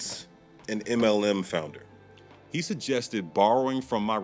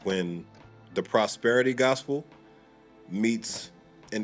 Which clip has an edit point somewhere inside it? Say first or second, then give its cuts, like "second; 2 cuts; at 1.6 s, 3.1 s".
first; 1 cut; at 1.8 s